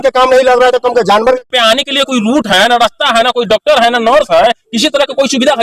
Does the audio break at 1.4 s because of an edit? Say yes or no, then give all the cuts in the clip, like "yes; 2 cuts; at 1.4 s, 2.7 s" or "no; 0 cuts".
yes; 1 cut; at 1.4 s